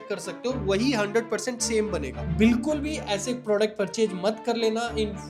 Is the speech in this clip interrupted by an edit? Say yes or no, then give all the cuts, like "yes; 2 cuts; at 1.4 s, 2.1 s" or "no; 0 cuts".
yes; 1 cut; at 2.2 s